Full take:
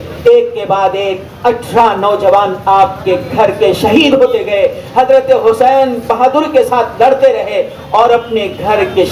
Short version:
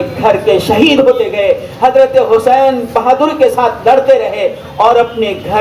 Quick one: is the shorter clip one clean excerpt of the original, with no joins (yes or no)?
yes